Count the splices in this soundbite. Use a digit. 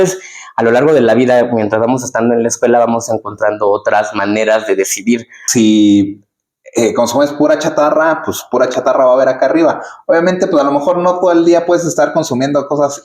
1